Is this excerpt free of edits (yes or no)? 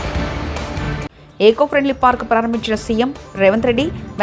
yes